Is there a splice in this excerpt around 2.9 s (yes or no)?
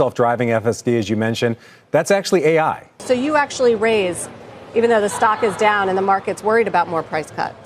yes